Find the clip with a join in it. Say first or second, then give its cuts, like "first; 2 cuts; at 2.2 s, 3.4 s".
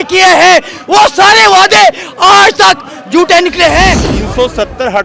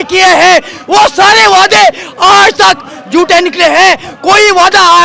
first; 1 cut; at 4.1 s